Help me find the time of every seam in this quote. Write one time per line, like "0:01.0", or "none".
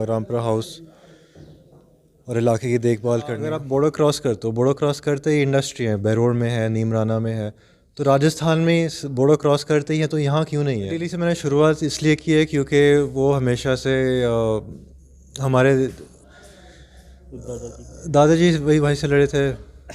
0:03.5
0:11.2